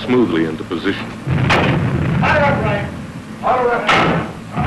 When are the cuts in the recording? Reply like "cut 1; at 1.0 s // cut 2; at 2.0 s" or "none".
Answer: cut 1; at 3.0 s